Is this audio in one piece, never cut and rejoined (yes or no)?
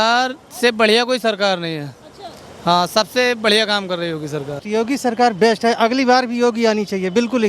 no